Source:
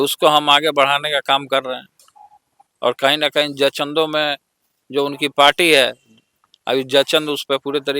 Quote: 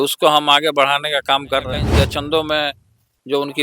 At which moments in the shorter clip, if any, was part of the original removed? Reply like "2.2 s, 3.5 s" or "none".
1.9 s